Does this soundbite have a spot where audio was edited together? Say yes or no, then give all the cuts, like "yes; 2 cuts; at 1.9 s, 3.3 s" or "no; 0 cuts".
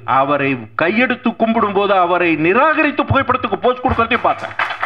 no; 0 cuts